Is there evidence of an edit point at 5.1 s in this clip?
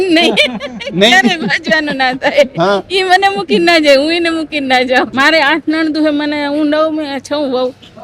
yes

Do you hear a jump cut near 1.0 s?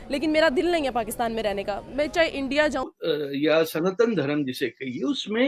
no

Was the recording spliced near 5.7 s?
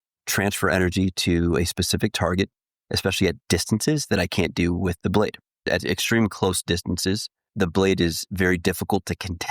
yes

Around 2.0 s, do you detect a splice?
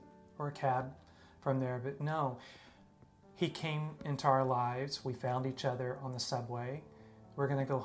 yes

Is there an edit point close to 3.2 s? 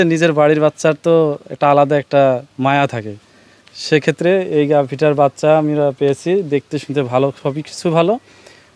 no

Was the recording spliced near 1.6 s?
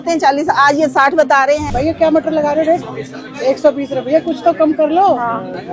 yes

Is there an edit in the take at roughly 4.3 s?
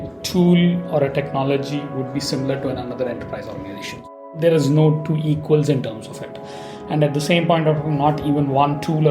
yes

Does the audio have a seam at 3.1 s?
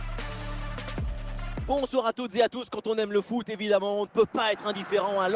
no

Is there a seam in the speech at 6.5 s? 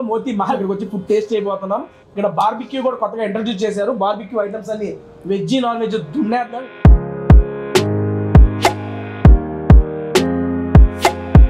yes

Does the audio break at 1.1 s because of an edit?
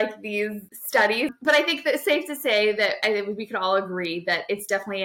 yes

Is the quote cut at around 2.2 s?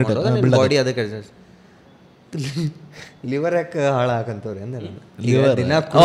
no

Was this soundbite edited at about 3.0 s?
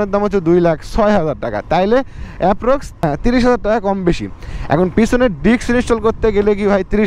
no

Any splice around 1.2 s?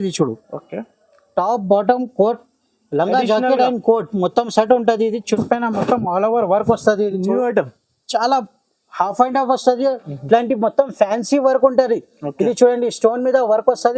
no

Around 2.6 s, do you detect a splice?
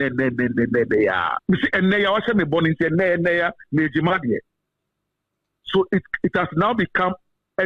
no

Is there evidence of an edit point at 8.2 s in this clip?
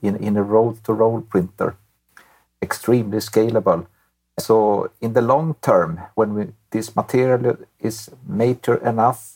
no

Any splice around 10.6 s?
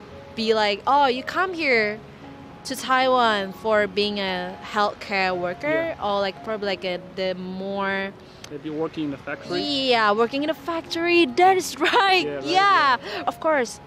no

